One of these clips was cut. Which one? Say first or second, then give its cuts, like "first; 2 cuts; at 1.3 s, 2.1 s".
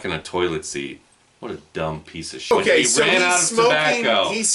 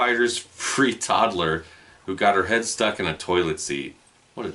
first; 1 cut; at 2.5 s